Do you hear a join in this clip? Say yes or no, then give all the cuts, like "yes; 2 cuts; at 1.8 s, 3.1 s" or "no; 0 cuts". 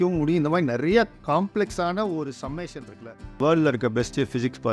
yes; 1 cut; at 3.4 s